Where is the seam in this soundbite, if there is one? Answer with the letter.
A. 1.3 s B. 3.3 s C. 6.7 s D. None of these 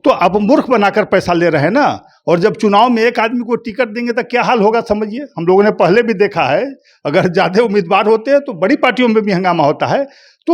D